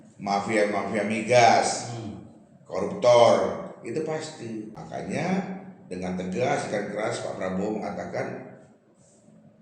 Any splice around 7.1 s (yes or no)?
no